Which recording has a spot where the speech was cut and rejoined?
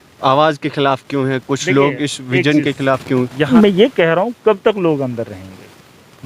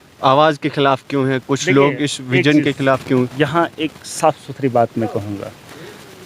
first; 1 cut; at 3.5 s

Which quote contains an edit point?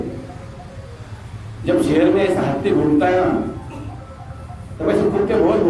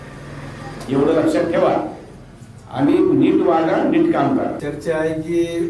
second; 1 cut; at 4.6 s

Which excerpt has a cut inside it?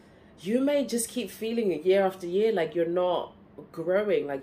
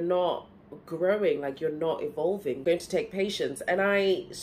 second; 1 cut; at 2.6 s

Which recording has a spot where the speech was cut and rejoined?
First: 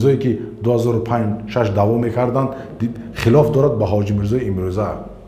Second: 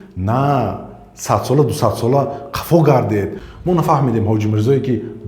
second; 1 cut; at 3.4 s

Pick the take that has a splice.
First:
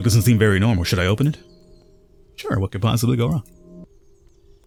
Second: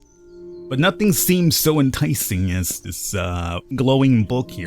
second; 1 cut; at 3.8 s

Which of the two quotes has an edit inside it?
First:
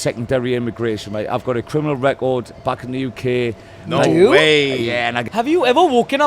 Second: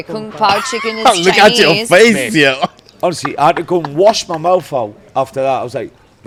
first; 1 cut; at 5.2 s

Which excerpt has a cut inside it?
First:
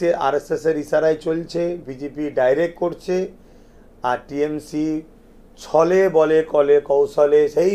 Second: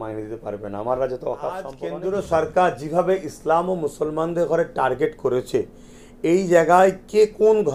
second; 1 cut; at 1.8 s

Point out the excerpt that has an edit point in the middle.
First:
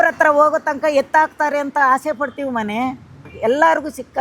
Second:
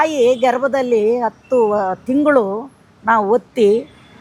first; 1 cut; at 3.3 s

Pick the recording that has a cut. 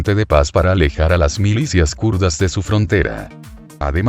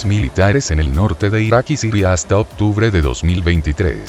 second; 1 cut; at 1.9 s

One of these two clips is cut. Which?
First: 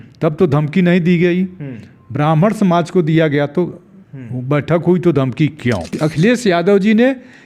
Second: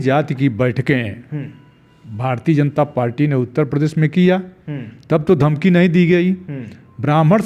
first; 1 cut; at 6.0 s

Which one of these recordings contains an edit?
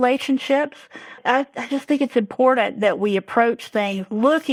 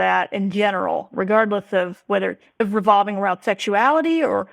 second; 2 cuts; at 1.1 s, 2.4 s

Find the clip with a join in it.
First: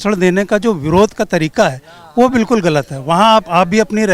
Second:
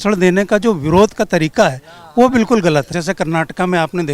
second; 1 cut; at 2.9 s

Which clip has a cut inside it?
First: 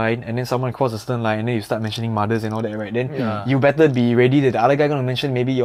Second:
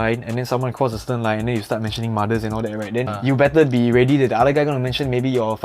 second; 1 cut; at 3.1 s

